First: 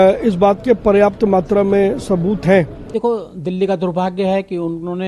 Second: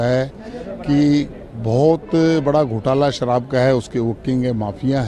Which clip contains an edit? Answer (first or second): first